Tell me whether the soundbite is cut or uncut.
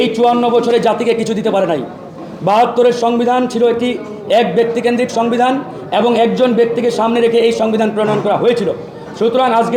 uncut